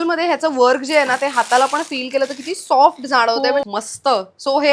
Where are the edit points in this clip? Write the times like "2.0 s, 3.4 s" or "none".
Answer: 3.7 s